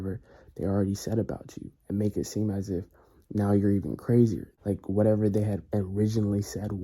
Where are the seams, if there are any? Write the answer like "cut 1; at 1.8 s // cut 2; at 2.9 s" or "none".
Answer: cut 1; at 4.5 s